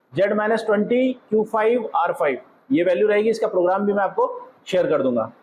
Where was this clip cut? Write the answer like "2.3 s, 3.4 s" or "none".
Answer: none

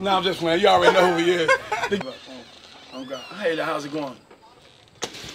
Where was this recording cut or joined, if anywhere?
2.0 s

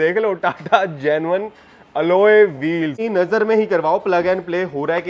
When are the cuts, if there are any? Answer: 3.0 s

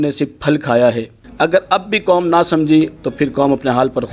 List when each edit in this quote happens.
1.2 s

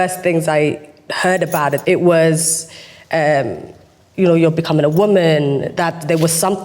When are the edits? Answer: 1.8 s

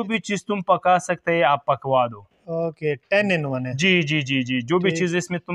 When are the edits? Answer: none

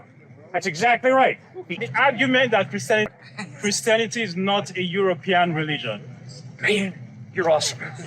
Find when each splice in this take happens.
3.2 s

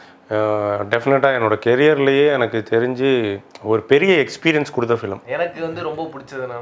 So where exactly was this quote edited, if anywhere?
5.2 s

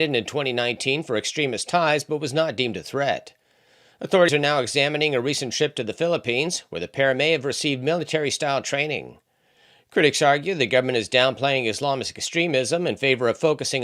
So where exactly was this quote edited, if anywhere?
4.3 s

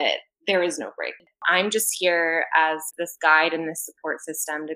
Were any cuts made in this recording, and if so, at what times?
1.4 s, 2.9 s

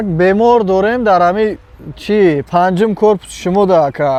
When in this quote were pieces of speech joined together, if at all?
none

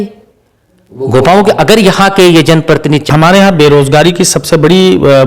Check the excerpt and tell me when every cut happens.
3.1 s

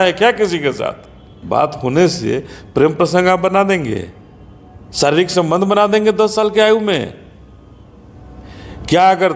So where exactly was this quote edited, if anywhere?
1.4 s

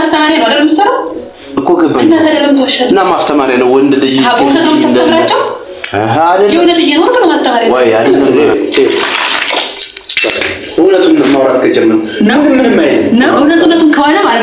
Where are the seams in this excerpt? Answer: 8.1 s, 13.3 s

